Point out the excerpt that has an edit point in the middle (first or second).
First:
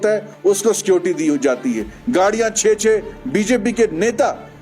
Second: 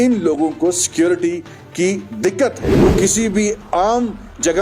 second